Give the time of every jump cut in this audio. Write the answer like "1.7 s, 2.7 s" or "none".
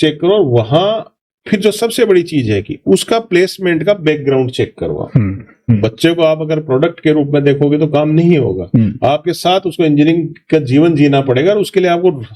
5.7 s